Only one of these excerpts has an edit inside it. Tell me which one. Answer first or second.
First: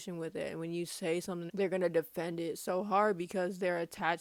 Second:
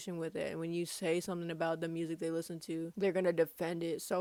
first